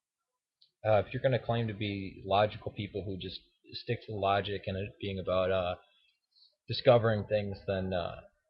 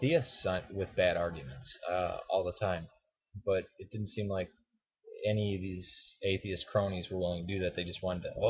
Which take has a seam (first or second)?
second